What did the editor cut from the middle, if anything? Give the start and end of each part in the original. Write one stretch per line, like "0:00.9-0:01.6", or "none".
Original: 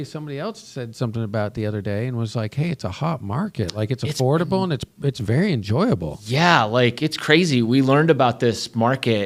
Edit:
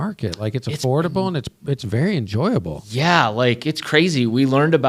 none